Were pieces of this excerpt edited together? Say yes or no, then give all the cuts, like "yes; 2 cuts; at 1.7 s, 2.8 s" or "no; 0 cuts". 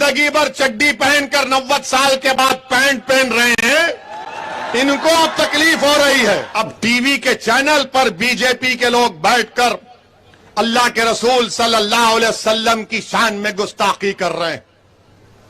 yes; 1 cut; at 6.5 s